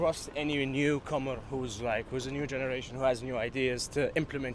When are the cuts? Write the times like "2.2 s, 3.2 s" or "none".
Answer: none